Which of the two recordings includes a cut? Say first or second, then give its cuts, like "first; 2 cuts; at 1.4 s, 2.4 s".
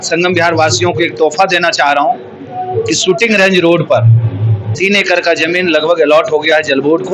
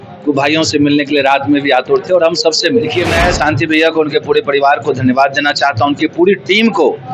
second; 1 cut; at 2.9 s